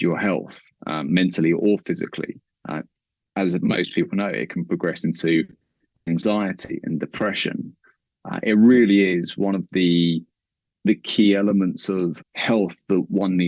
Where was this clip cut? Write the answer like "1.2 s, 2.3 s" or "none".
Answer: 12.3 s